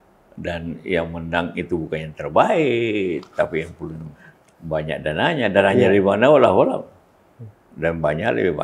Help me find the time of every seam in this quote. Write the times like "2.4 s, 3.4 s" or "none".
none